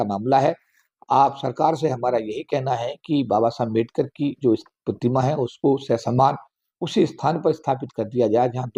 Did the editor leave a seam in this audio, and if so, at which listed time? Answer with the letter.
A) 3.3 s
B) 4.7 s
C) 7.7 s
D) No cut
D